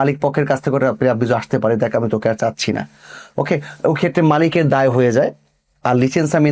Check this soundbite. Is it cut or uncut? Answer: uncut